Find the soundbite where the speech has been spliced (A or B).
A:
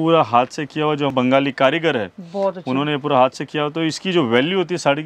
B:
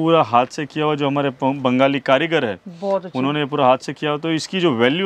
A